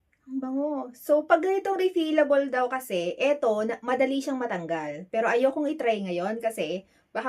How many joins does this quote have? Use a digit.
0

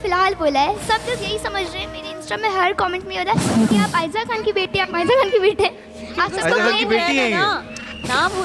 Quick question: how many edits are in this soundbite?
0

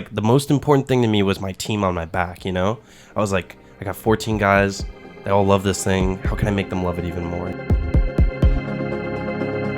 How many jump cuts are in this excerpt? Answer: 1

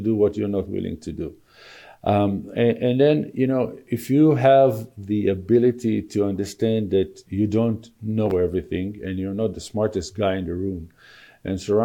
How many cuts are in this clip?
0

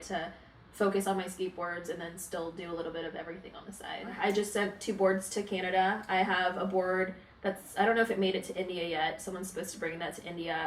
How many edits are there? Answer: 1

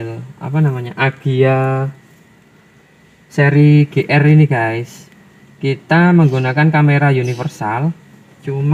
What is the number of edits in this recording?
0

